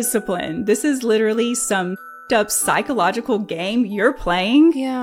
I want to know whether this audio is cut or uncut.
cut